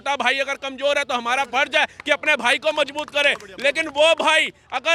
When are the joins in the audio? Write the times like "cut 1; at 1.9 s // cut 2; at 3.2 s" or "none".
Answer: none